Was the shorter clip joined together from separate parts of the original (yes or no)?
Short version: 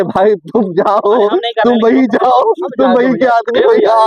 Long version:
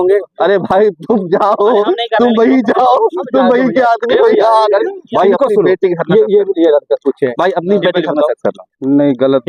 no